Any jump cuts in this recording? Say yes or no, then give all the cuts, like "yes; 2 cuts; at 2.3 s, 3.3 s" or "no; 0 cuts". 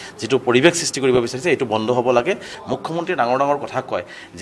yes; 1 cut; at 2.5 s